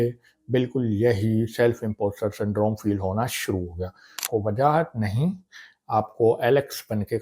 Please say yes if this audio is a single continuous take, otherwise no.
no